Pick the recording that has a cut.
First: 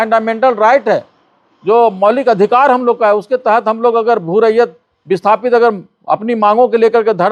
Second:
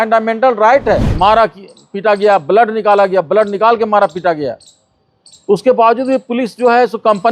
second; 1 cut; at 1.2 s

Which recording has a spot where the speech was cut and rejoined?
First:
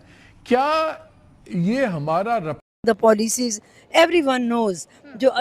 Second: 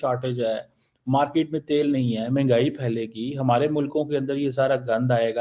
first; 1 cut; at 2.7 s

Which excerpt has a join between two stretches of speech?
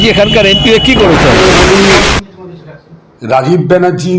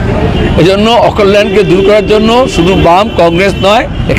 first; 1 cut; at 1.4 s

